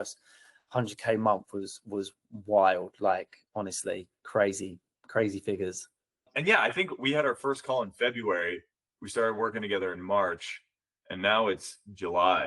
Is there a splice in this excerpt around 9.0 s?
no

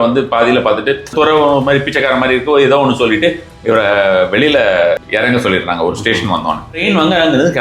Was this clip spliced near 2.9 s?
no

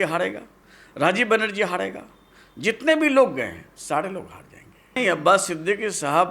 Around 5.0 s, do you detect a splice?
yes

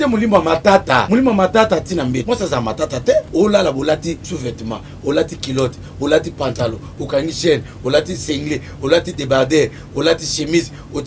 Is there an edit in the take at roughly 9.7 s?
no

